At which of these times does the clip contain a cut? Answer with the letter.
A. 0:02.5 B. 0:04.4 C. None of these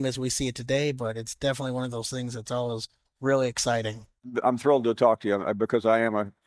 B